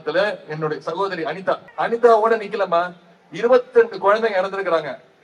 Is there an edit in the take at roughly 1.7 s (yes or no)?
yes